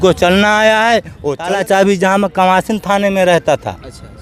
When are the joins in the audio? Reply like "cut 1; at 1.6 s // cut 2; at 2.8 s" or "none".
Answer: cut 1; at 1.4 s

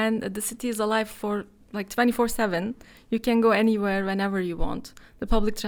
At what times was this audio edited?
none

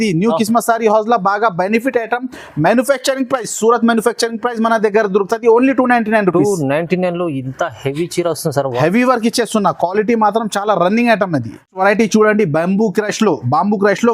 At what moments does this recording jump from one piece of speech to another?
none

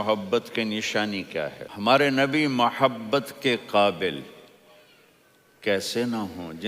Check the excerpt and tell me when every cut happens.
cut 1; at 1.6 s

